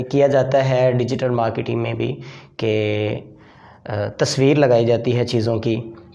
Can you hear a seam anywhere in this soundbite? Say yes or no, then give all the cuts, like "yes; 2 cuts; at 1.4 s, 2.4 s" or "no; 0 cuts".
no; 0 cuts